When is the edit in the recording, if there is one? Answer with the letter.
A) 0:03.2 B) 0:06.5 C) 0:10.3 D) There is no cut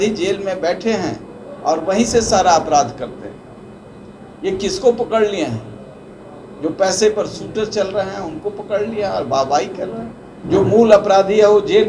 C